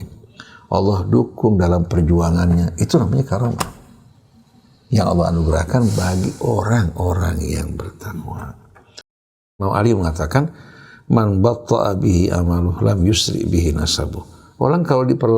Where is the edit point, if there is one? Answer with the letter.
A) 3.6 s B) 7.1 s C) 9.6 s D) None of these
C